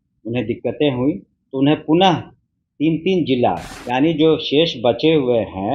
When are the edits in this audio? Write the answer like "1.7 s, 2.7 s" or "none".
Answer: 3.7 s